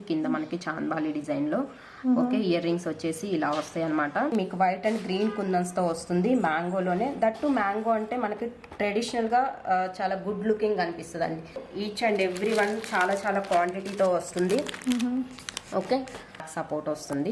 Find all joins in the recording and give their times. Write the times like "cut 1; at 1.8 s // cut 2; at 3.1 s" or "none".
cut 1; at 4.3 s // cut 2; at 11.6 s // cut 3; at 16.4 s